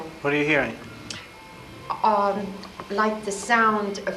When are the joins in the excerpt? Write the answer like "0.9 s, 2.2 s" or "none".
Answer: none